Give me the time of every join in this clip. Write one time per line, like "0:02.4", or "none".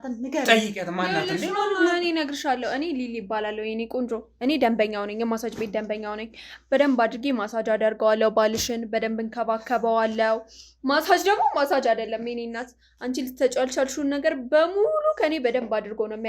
none